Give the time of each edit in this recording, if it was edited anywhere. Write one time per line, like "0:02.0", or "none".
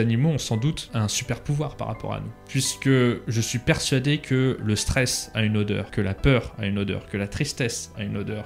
0:00.8
0:02.4
0:03.2
0:05.9